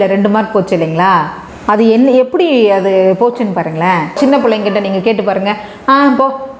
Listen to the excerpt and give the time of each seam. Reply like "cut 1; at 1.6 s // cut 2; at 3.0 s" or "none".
cut 1; at 4.2 s